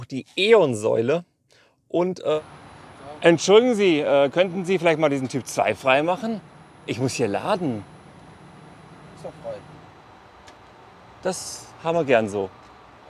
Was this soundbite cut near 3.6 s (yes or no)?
no